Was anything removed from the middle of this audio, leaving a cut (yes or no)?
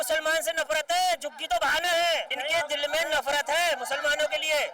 yes